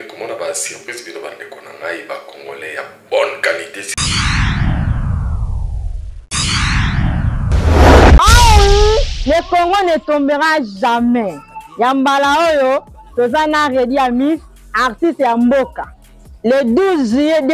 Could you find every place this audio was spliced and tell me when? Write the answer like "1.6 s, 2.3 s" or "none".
3.8 s